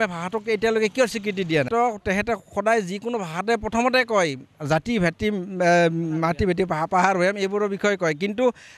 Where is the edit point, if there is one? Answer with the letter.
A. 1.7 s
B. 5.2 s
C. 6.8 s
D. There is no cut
A